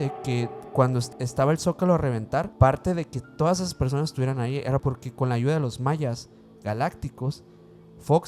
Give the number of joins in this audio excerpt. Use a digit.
3